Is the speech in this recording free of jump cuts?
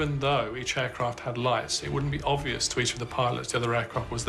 yes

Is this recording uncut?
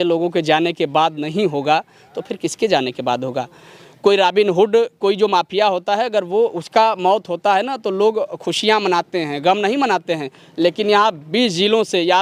yes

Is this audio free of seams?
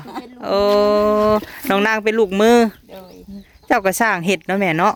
yes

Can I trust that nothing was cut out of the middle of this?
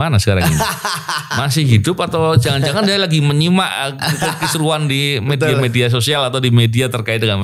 yes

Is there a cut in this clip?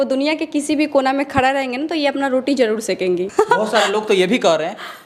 yes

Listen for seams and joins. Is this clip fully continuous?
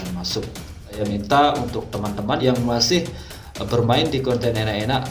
no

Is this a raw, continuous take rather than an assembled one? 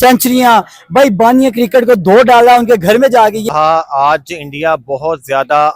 no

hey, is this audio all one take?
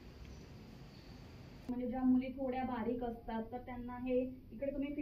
no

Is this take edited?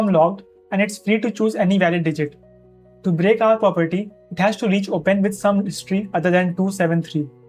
no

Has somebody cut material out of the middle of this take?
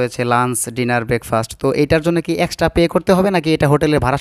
no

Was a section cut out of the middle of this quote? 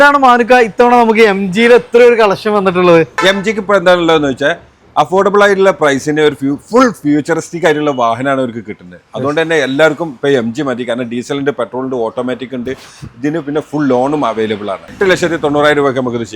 yes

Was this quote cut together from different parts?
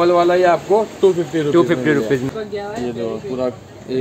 yes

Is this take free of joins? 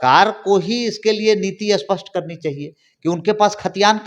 yes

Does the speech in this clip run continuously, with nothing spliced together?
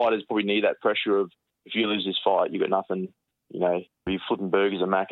no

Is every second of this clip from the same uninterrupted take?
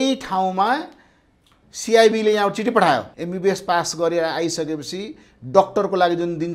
no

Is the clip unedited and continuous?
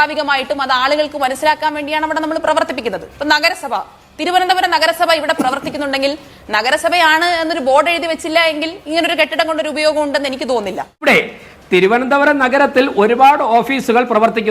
no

